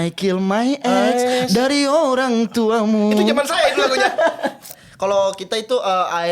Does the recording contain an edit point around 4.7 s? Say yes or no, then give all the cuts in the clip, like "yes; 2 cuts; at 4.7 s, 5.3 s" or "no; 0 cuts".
yes; 1 cut; at 4.7 s